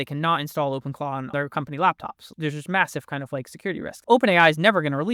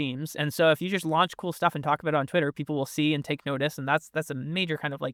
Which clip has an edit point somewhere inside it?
first; 3 cuts; at 1.3 s, 2.3 s, 3.9 s

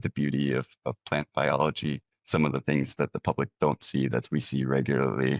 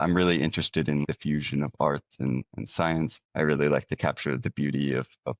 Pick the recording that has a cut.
second; 1 cut; at 1.0 s

